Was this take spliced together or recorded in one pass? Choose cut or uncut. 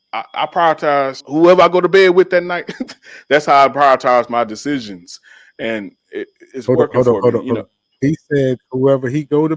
cut